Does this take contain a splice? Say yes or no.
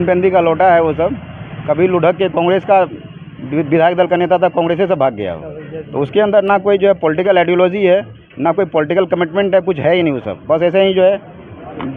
no